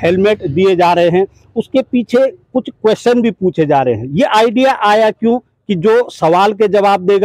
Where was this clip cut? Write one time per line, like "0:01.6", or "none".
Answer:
none